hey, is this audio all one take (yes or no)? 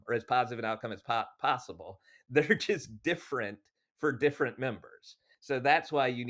no